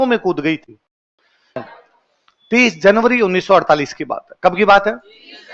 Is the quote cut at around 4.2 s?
no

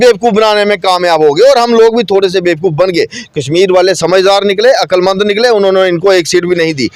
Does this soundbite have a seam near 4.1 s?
no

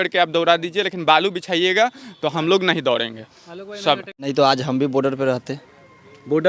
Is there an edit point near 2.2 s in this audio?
no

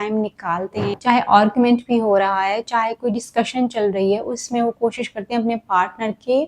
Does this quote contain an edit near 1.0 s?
yes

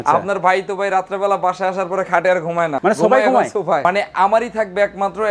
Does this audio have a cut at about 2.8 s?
yes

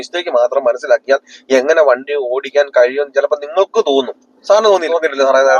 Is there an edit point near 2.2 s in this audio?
no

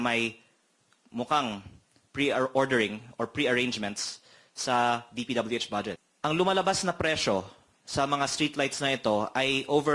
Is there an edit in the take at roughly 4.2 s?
no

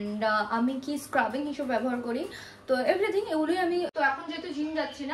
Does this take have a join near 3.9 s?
yes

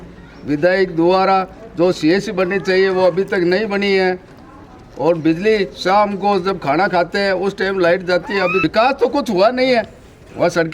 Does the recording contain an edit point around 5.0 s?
no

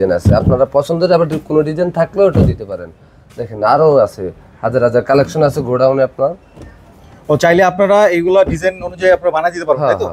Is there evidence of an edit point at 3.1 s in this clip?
no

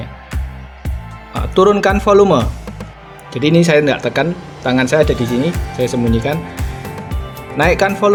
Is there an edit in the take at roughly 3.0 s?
no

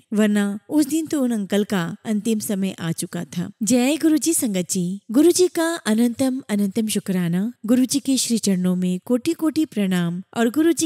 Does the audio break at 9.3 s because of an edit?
no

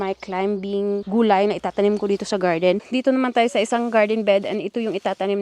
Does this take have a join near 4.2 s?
no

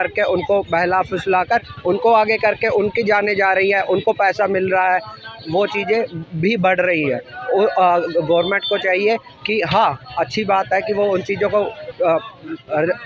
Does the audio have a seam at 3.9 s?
no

